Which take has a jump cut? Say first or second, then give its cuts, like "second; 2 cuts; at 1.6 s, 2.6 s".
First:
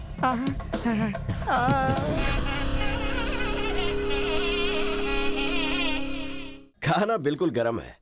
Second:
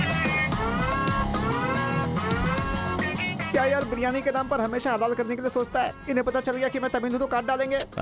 first; 2 cuts; at 2.2 s, 6.6 s